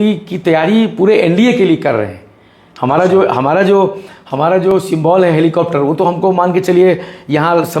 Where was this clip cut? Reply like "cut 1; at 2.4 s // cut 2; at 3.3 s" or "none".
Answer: none